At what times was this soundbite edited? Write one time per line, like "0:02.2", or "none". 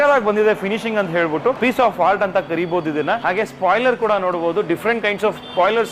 0:01.6
0:03.2